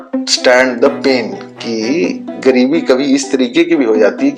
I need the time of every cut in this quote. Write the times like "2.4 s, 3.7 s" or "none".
none